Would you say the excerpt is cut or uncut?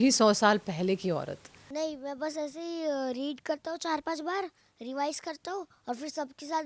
cut